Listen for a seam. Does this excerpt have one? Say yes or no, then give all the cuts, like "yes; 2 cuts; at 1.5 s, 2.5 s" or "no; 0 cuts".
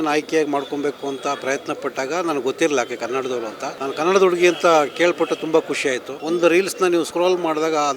yes; 3 cuts; at 3.7 s, 6.1 s, 7.1 s